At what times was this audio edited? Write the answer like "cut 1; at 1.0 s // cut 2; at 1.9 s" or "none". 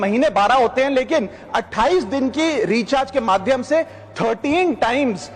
none